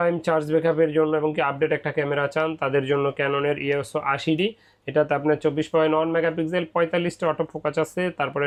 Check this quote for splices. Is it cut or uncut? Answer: uncut